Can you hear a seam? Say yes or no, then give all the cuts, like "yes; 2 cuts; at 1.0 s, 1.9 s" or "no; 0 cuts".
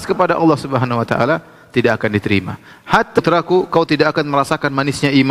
yes; 1 cut; at 3.2 s